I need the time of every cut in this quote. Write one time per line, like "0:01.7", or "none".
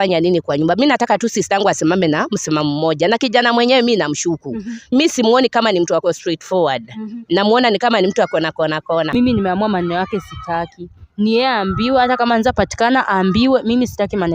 0:09.1